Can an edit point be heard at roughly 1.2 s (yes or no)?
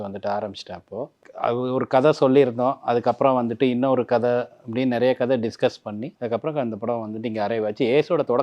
yes